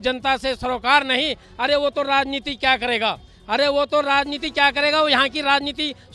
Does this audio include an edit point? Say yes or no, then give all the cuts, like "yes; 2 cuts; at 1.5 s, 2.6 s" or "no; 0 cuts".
no; 0 cuts